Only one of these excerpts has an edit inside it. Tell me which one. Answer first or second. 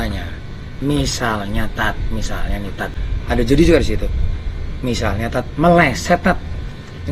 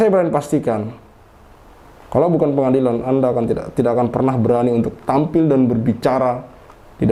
first